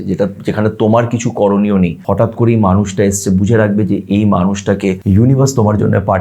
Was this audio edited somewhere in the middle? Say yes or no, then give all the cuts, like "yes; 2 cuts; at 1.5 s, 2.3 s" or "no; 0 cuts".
yes; 2 cuts; at 2.0 s, 5.0 s